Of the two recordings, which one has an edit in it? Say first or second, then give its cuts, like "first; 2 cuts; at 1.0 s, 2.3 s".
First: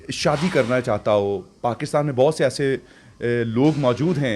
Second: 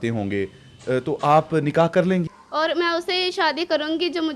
second; 1 cut; at 2.2 s